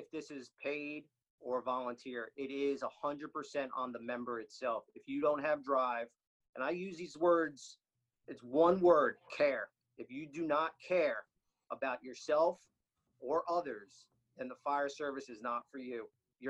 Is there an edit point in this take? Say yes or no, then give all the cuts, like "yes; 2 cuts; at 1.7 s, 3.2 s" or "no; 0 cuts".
no; 0 cuts